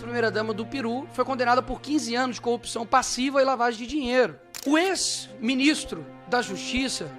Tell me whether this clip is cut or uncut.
cut